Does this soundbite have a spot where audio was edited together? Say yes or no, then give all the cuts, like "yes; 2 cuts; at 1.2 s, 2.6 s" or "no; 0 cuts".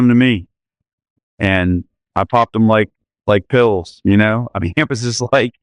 no; 0 cuts